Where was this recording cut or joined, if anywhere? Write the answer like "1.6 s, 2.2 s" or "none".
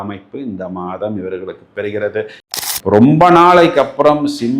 2.4 s